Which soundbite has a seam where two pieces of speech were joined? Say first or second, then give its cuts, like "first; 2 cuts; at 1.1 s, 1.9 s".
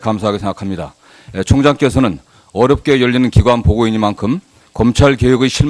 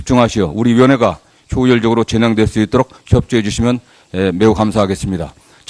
first; 1 cut; at 2.1 s